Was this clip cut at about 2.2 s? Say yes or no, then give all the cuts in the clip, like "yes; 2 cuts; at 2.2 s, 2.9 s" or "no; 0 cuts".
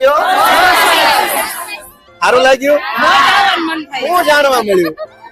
no; 0 cuts